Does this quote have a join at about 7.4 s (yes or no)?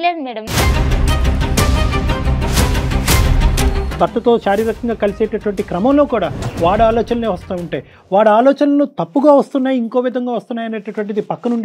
no